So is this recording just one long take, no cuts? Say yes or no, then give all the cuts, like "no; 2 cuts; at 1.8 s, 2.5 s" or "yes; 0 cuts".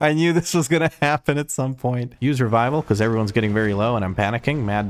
no; 1 cut; at 2.1 s